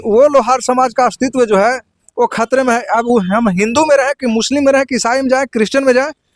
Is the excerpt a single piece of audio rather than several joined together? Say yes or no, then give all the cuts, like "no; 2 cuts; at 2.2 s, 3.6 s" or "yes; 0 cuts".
yes; 0 cuts